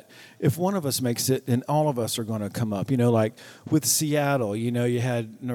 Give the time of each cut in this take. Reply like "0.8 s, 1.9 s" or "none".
none